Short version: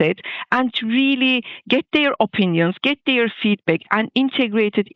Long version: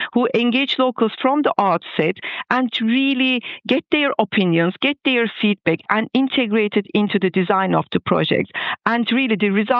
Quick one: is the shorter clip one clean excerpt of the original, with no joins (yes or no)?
yes